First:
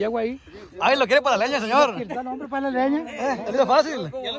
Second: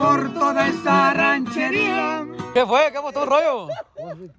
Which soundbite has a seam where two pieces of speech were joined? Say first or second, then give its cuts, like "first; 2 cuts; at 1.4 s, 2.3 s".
second; 1 cut; at 2.4 s